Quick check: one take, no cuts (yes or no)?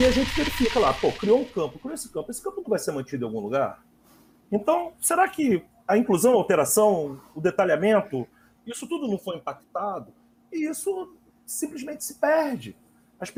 yes